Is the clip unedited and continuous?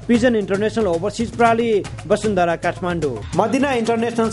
yes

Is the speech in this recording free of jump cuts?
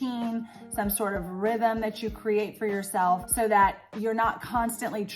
no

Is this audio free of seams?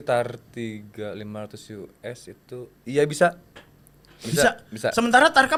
yes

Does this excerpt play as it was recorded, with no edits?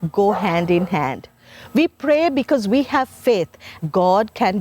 no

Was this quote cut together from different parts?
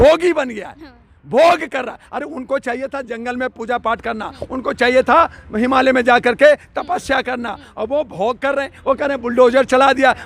no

